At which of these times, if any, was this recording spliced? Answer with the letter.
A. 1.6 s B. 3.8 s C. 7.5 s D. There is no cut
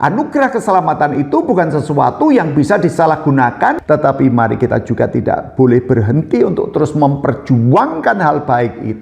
B